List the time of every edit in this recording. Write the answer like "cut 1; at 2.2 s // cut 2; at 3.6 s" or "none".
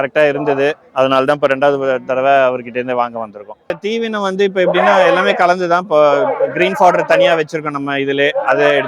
cut 1; at 3.8 s